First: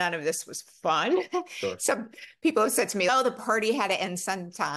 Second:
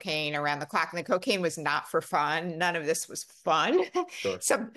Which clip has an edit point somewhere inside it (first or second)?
first